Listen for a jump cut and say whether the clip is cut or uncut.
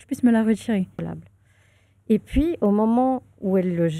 cut